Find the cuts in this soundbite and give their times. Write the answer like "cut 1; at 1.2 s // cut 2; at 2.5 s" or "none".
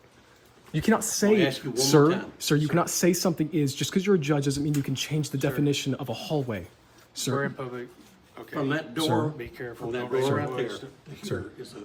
none